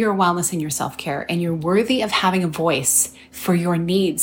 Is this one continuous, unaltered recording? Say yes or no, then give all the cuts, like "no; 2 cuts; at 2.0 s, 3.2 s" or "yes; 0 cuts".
yes; 0 cuts